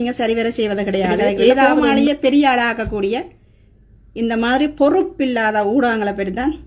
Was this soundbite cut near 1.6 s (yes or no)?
yes